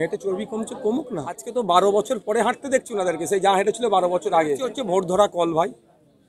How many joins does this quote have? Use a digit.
2